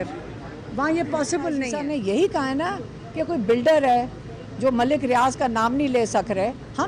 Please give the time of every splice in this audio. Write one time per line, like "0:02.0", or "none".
0:01.7